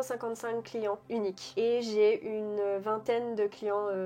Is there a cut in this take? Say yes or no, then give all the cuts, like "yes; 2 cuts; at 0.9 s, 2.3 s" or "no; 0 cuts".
no; 0 cuts